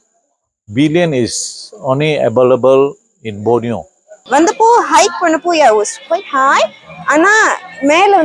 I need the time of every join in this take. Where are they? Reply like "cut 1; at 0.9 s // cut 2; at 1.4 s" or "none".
cut 1; at 4.1 s

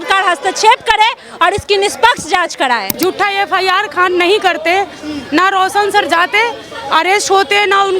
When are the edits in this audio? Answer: cut 1; at 2.9 s

